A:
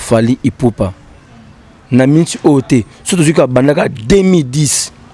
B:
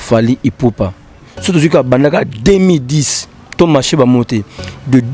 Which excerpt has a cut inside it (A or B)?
B